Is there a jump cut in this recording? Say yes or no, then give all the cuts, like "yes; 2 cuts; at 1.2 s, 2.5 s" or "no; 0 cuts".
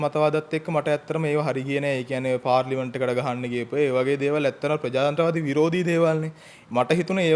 no; 0 cuts